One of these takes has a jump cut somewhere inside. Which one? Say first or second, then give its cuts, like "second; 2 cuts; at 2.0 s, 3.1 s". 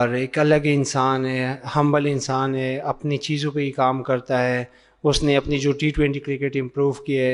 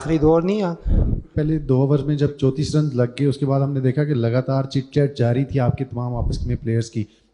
second; 1 cut; at 1.3 s